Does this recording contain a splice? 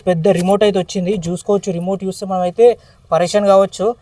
no; 0 cuts

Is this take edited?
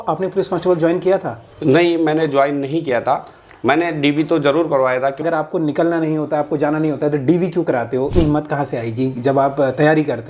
yes; 2 cuts; at 5.2 s, 8.1 s

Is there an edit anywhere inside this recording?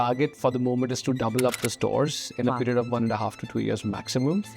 no; 0 cuts

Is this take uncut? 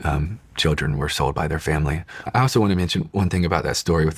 no; 1 cut; at 2.1 s

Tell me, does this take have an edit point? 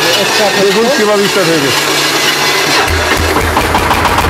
no; 0 cuts

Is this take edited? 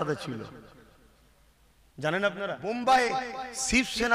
yes; 1 cut; at 2.6 s

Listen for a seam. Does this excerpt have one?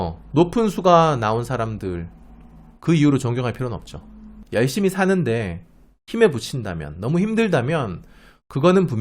yes; 1 cut; at 4.3 s

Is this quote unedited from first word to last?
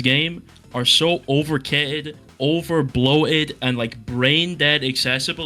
yes; 0 cuts

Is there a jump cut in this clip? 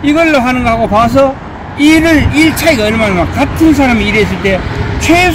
no; 0 cuts

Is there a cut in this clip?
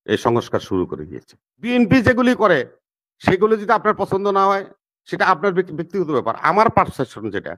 yes; 1 cut; at 1.7 s

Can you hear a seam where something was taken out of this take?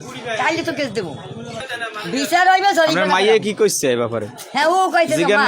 yes; 1 cut; at 1.6 s

